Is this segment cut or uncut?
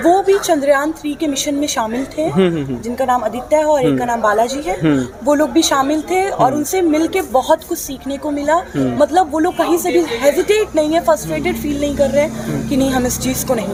uncut